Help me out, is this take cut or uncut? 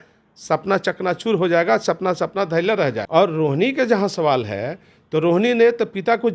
cut